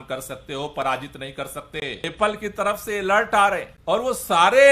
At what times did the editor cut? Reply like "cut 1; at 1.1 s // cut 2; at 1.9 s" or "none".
cut 1; at 2.0 s // cut 2; at 3.7 s